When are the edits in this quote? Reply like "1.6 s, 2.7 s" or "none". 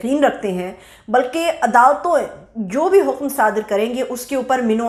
none